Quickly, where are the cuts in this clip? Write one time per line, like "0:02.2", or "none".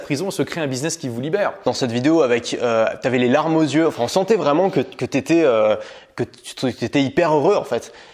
0:01.6